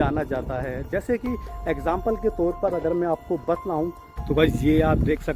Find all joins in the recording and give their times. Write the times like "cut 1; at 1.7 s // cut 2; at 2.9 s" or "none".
cut 1; at 4.1 s